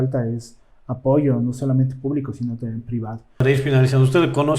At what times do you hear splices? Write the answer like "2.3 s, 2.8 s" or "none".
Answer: 3.4 s